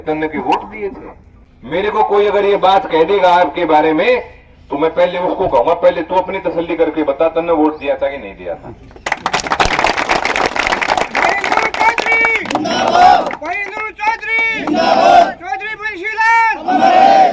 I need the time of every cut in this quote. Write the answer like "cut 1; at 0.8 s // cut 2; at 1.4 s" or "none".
none